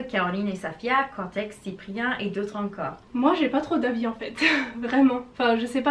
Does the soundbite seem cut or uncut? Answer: uncut